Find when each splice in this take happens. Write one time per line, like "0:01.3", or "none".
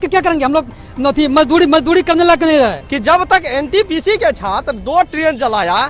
0:02.8